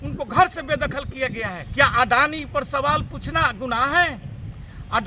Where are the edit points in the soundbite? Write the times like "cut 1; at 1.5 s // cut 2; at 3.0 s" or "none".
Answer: cut 1; at 1.6 s